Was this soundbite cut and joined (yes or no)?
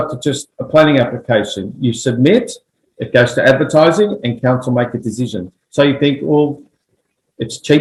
no